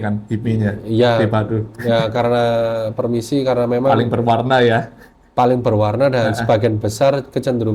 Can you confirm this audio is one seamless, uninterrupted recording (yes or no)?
yes